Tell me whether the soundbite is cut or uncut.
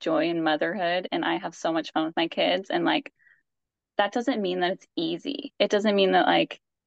uncut